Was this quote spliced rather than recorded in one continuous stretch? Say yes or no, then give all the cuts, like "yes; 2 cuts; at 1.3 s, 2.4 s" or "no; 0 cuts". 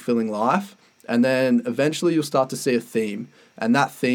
no; 0 cuts